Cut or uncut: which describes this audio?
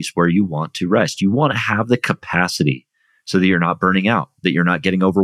uncut